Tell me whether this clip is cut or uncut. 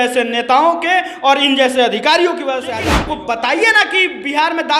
cut